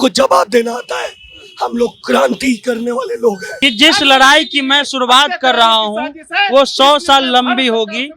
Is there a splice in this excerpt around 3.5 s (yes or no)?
yes